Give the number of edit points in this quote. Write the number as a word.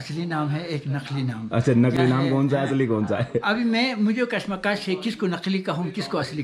zero